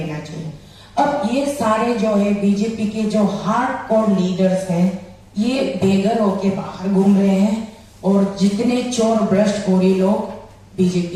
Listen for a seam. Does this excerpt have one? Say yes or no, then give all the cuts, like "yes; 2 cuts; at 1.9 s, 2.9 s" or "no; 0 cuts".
no; 0 cuts